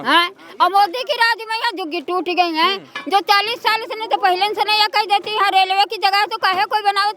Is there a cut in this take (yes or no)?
no